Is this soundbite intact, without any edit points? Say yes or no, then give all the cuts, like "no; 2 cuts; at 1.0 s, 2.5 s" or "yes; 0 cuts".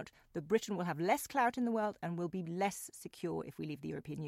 yes; 0 cuts